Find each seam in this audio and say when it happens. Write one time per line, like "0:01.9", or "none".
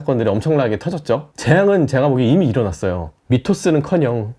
0:01.3
0:03.1

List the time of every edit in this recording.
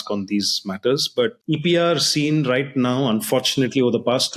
0:01.4

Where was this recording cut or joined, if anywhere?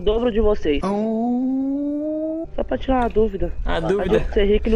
0:02.4

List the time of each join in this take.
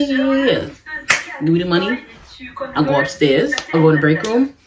0:03.6

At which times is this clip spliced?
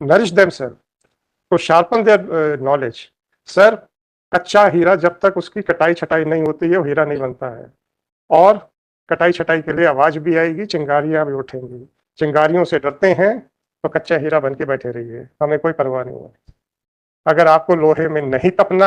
none

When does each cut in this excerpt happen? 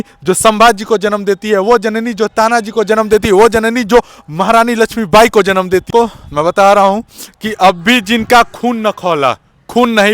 0:05.9

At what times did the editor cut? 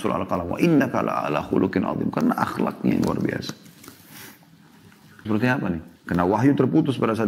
0:05.2

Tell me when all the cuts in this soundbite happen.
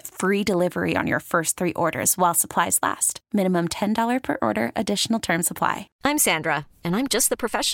0:05.9

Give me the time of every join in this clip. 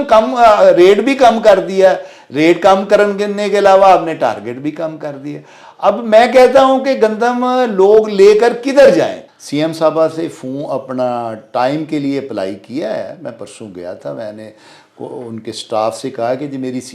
0:09.3

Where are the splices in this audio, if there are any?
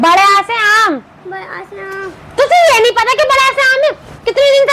none

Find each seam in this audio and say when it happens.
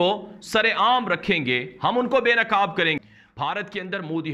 0:03.0

